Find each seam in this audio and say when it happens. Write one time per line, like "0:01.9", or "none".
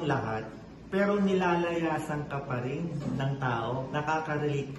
0:03.9